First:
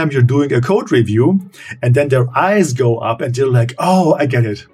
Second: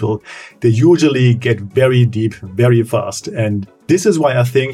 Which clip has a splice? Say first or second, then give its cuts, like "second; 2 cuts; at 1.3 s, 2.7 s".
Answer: second; 1 cut; at 3.7 s